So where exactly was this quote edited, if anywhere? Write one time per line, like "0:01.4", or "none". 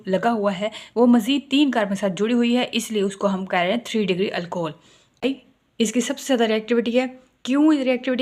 0:05.2